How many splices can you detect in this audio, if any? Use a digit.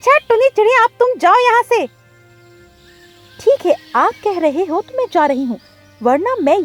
0